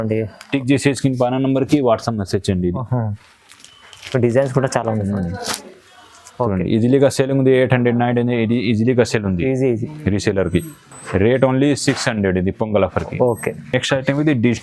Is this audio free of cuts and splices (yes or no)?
yes